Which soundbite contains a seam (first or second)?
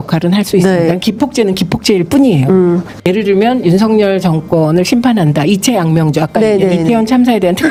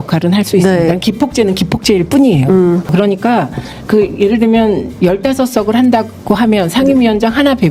second